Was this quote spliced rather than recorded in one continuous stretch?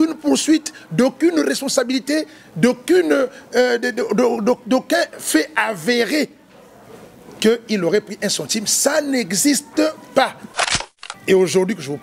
yes; 1 cut; at 10.9 s

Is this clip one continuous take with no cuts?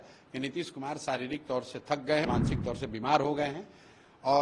no; 1 cut; at 2.3 s

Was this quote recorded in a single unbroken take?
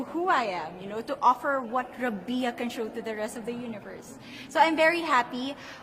yes; 0 cuts

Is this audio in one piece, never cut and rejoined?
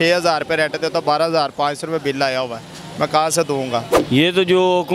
no; 1 cut; at 3.9 s

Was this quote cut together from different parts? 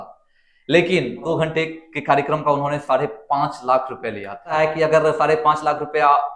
yes; 2 cuts; at 1.2 s, 4.5 s

